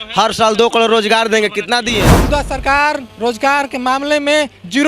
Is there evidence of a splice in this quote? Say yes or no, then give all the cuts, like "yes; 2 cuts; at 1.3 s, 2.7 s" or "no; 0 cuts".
yes; 1 cut; at 2.1 s